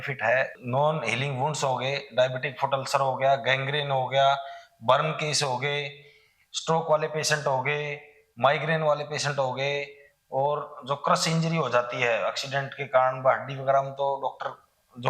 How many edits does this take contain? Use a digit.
0